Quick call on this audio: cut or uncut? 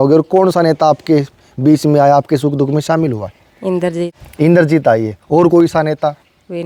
uncut